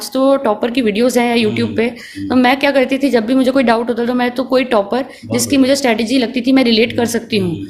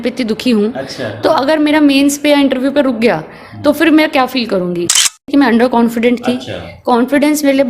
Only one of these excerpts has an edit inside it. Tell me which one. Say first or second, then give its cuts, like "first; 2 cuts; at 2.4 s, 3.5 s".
second; 1 cut; at 5.1 s